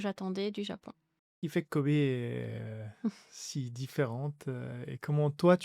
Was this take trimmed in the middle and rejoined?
yes; 1 cut; at 1.4 s

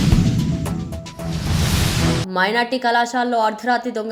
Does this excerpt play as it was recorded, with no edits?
no; 1 cut; at 2.2 s

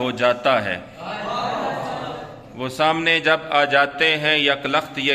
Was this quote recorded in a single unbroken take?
yes; 0 cuts

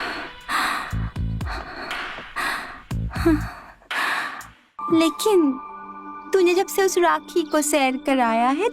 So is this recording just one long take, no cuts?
no; 1 cut; at 4.7 s

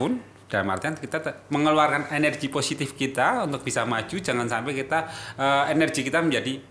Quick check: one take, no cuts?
yes; 0 cuts

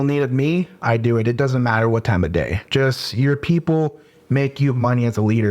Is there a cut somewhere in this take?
yes; 1 cut; at 2.6 s

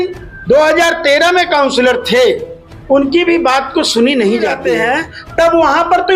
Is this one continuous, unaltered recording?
no; 1 cut; at 4.6 s

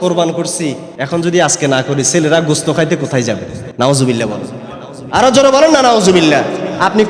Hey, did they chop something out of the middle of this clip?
yes; 2 cuts; at 0.9 s, 3.6 s

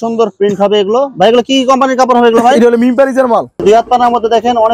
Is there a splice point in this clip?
yes; 1 cut; at 3.6 s

